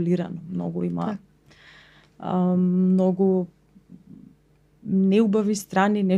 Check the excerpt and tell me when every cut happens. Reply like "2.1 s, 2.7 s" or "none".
none